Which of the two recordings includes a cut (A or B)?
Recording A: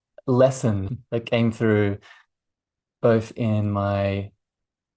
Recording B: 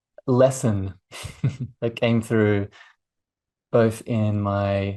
A